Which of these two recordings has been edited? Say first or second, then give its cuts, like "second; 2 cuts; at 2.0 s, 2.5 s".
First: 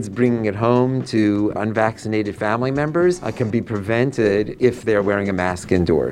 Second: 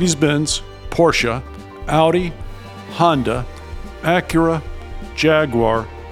first; 3 cuts; at 1.6 s, 3.3 s, 4.5 s